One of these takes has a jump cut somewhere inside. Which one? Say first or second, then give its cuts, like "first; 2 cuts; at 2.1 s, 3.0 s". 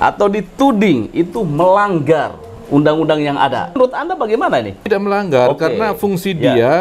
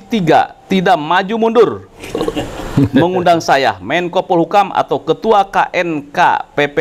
first; 2 cuts; at 3.8 s, 4.9 s